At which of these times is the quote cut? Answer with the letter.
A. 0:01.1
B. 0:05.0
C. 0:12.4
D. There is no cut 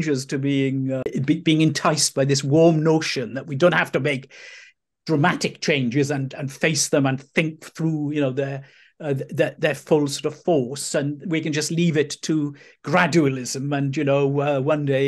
A